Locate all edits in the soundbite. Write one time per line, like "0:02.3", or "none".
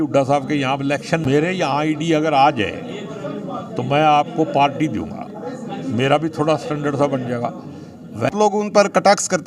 0:01.2
0:08.3